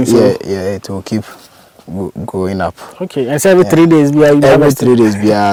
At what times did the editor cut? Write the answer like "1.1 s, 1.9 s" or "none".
none